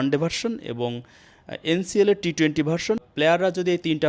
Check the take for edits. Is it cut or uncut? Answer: cut